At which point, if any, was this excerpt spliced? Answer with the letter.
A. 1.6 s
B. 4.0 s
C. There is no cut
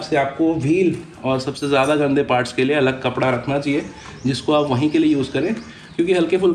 C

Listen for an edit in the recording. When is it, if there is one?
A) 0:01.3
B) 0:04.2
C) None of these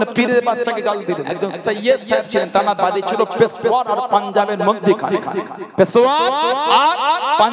A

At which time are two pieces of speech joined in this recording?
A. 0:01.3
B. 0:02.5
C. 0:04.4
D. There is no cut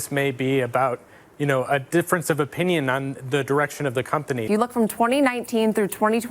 C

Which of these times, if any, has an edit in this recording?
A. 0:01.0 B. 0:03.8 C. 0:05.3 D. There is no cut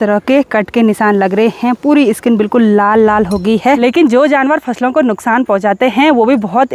B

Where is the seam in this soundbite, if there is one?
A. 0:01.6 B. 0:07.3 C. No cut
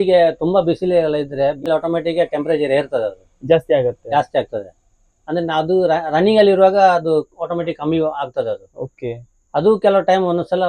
A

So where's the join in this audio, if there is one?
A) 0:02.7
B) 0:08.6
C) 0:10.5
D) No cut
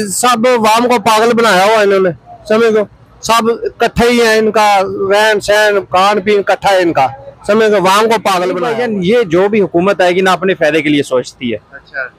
B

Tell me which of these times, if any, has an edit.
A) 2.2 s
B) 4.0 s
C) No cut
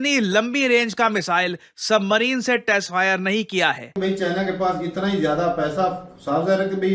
B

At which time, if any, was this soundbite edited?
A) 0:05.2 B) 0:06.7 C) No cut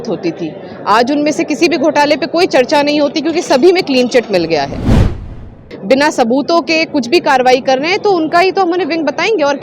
A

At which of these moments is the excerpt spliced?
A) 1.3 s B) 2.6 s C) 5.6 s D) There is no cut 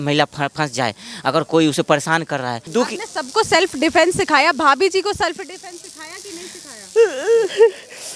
B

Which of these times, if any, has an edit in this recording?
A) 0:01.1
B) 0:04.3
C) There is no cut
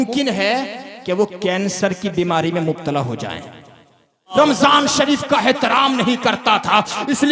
B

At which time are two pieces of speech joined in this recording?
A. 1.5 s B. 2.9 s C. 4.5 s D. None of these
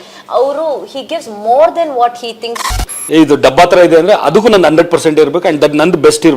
B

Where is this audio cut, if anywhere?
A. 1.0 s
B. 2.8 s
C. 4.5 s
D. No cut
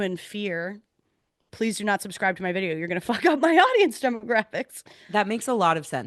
D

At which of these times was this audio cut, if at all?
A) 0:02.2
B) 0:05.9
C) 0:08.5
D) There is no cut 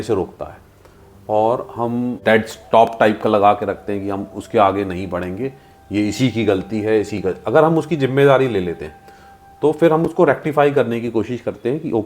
A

